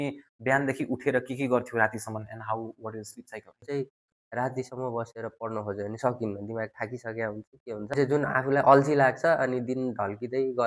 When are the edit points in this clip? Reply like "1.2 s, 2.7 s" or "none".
3.6 s, 7.9 s